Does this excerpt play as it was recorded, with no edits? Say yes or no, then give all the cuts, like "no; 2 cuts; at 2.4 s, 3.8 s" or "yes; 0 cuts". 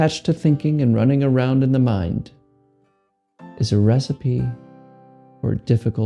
yes; 0 cuts